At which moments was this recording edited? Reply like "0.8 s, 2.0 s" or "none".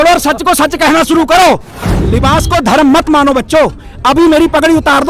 1.7 s